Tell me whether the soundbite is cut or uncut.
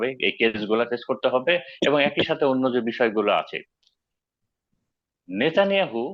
uncut